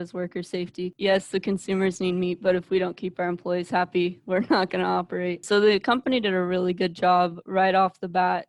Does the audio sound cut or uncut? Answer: cut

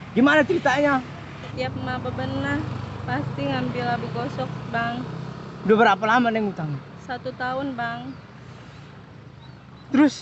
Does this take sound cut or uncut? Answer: cut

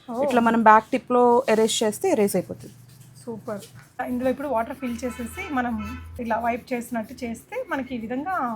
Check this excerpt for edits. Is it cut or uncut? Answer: cut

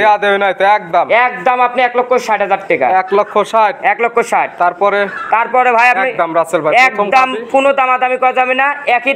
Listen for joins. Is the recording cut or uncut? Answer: uncut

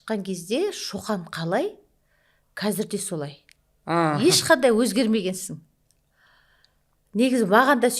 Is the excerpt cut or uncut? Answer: uncut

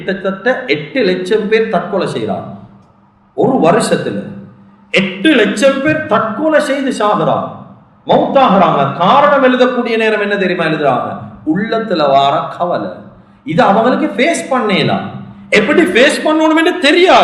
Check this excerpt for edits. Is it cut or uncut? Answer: uncut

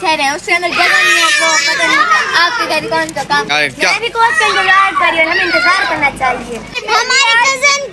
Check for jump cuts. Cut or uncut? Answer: cut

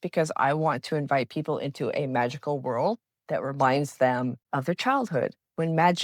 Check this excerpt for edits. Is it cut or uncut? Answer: cut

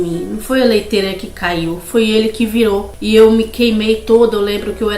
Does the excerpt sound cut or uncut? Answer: uncut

